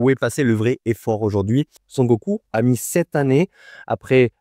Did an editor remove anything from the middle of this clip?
yes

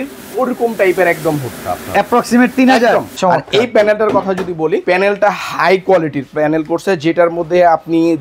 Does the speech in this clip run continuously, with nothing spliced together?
no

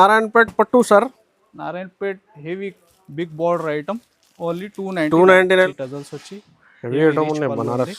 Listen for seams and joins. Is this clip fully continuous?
no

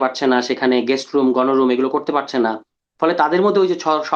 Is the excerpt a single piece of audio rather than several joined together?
yes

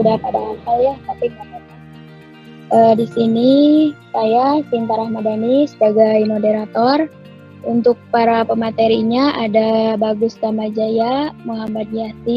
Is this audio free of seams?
yes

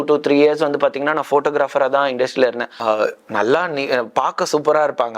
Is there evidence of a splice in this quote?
yes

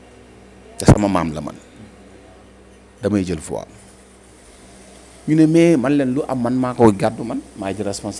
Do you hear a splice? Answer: no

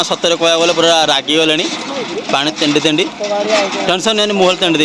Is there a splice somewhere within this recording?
no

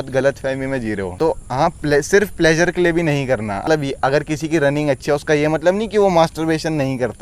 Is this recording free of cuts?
no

